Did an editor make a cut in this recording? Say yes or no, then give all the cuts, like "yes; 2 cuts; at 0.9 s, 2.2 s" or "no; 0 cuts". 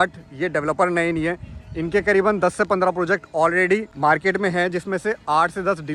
no; 0 cuts